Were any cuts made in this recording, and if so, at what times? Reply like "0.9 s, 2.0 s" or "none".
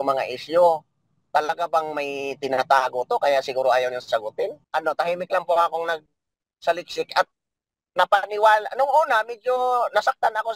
4.6 s